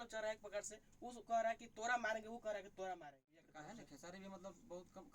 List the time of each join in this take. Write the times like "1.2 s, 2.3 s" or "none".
3.5 s